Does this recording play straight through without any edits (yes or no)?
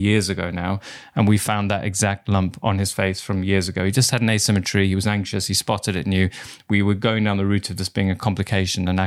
yes